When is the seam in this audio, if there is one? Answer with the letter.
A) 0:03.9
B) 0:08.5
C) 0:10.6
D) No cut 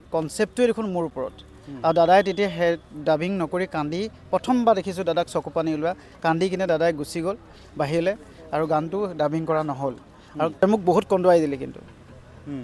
C